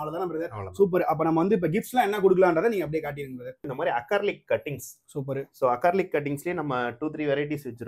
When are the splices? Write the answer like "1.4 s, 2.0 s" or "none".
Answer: 3.6 s

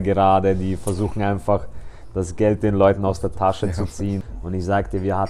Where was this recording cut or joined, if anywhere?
4.2 s

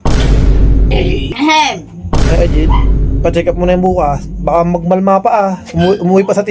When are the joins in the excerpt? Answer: 1.3 s

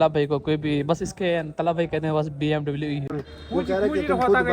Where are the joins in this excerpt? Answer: 3.0 s

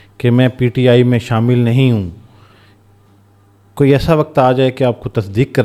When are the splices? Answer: none

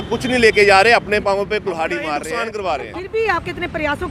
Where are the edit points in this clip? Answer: 2.2 s

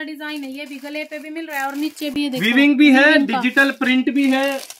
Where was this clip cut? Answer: none

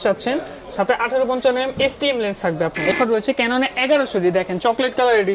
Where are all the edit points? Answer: 2.9 s

